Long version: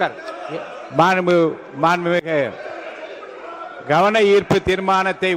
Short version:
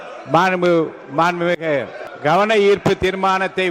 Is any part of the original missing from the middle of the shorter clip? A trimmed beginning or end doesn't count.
yes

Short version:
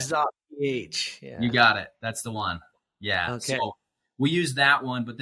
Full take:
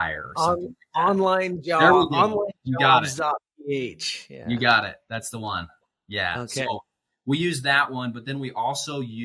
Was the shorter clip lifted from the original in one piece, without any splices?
yes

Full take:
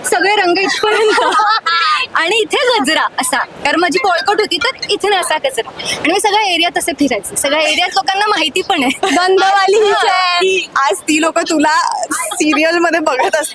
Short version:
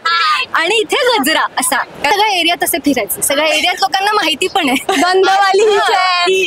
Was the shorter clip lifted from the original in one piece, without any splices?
no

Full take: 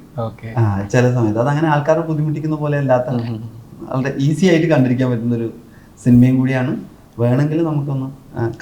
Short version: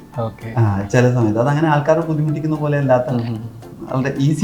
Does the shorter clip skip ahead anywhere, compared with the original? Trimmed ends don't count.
no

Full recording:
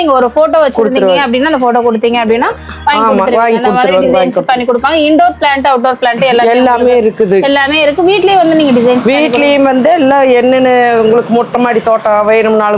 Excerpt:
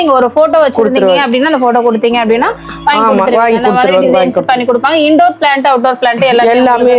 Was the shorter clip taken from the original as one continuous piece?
yes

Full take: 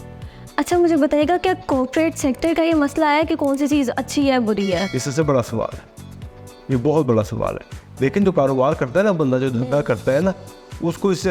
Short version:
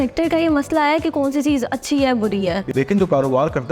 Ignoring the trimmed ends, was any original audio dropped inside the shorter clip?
yes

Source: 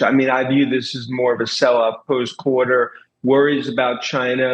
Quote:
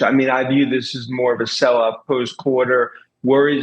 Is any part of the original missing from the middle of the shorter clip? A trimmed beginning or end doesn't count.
no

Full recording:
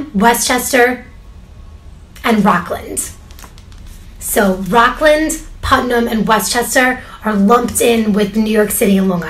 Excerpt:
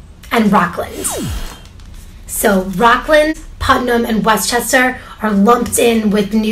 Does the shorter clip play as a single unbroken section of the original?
no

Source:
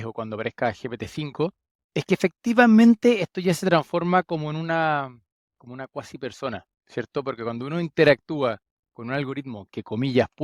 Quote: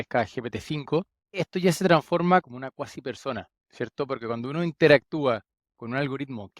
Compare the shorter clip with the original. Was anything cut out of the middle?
yes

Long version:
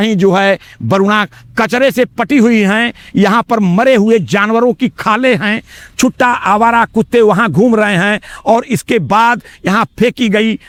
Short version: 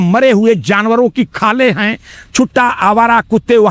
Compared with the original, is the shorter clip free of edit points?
yes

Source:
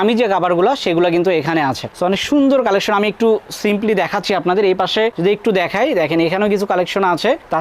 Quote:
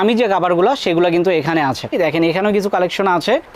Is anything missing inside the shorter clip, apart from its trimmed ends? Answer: yes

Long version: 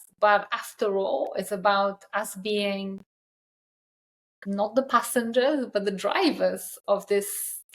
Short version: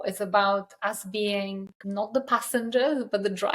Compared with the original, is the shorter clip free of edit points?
no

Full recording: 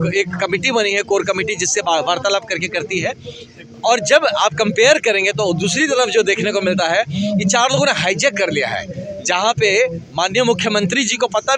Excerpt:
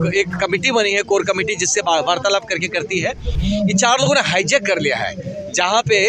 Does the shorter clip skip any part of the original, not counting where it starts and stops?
yes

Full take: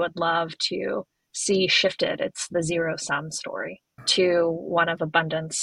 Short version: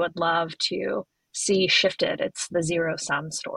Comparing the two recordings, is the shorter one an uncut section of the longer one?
yes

